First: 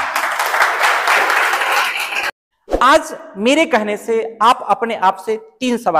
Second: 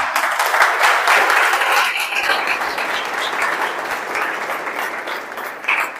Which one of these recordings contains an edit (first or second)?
first